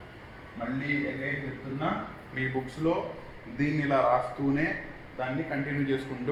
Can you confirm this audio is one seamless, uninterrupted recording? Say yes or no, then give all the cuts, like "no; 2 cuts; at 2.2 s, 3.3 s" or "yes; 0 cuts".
yes; 0 cuts